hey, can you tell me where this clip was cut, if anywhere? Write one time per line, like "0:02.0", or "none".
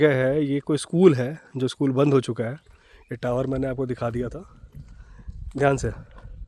none